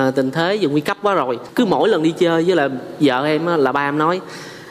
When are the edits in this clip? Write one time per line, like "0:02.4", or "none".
0:01.4